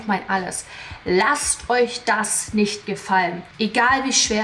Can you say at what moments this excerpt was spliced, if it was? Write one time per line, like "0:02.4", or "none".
0:03.4